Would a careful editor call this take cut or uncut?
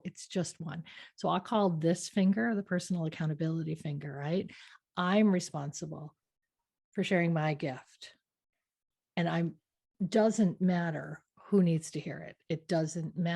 uncut